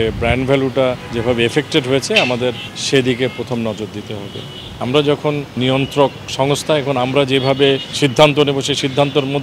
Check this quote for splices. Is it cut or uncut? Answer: cut